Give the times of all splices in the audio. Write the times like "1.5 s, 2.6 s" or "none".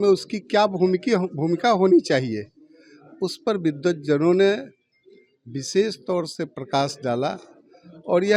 none